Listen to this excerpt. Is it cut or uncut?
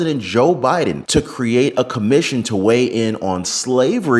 uncut